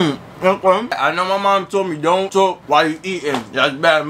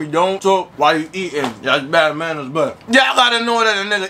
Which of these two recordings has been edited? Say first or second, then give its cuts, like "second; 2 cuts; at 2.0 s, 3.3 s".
first; 1 cut; at 1.0 s